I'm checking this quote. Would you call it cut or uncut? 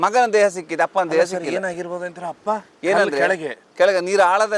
uncut